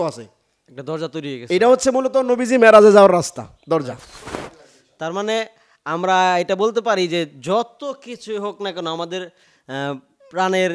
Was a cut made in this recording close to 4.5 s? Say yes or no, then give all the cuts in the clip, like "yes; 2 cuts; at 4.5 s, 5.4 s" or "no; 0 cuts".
yes; 1 cut; at 4.5 s